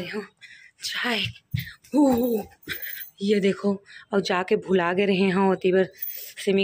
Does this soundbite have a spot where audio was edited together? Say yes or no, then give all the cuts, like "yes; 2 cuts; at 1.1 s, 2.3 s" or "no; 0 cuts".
no; 0 cuts